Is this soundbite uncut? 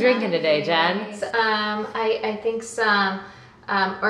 no; 1 cut; at 1.1 s

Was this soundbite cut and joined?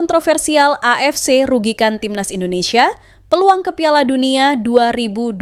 no; 0 cuts

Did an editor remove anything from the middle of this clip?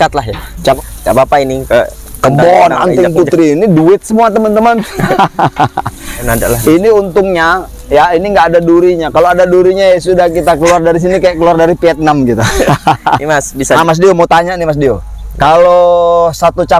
yes; 3 cuts; at 0.8 s, 6.3 s, 13.8 s

